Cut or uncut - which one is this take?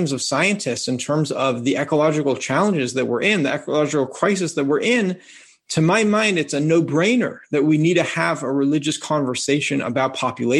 uncut